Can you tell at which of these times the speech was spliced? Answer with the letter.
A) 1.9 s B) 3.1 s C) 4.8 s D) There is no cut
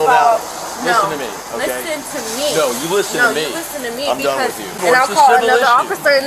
C